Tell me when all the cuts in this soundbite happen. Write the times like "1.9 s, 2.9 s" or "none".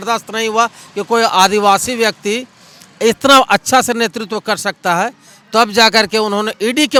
none

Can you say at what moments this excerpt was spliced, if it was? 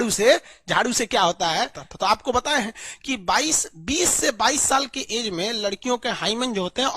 1.8 s

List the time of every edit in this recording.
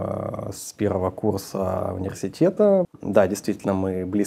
2.9 s

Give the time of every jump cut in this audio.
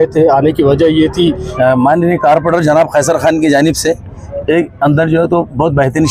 1.5 s

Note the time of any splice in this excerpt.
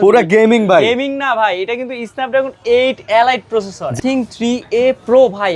4.0 s

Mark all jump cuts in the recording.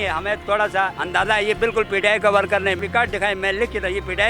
1.0 s, 2.8 s

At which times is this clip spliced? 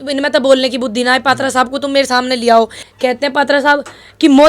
2.8 s

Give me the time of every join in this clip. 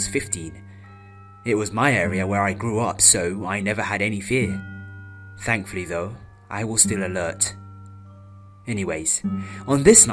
8.8 s

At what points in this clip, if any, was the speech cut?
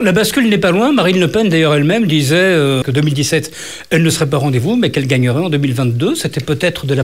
2.8 s

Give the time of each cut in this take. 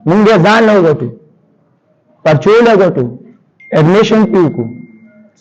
none

